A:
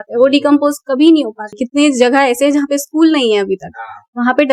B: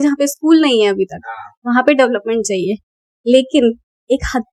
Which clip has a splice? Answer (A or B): A